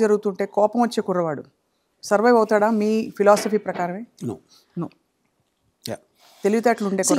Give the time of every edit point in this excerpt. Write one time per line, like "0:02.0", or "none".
none